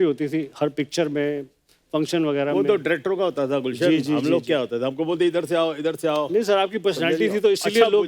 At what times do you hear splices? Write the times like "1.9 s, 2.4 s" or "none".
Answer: none